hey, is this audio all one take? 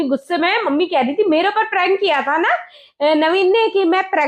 yes; 0 cuts

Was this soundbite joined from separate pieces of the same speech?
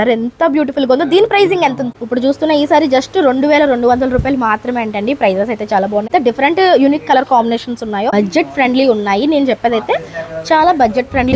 yes; 3 cuts; at 1.9 s, 6.1 s, 8.1 s

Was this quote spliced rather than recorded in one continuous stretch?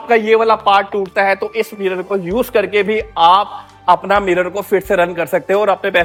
no; 0 cuts

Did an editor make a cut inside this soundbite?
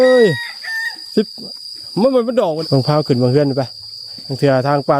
yes; 1 cut; at 2.6 s

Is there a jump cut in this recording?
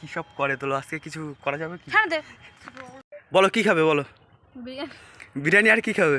yes; 1 cut; at 2.6 s

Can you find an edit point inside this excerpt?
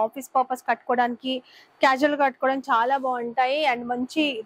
no; 0 cuts

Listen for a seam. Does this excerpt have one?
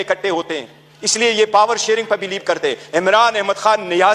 no; 0 cuts

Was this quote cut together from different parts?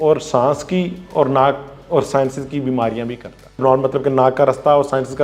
yes; 1 cut; at 3.6 s

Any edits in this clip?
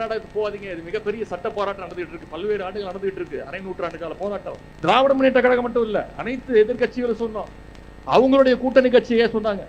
no; 0 cuts

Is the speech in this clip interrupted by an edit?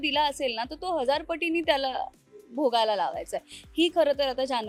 no; 0 cuts

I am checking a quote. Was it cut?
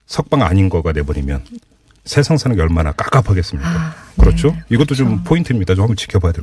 yes; 1 cut; at 5.0 s

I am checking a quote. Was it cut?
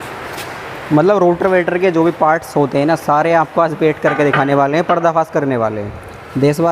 no; 0 cuts

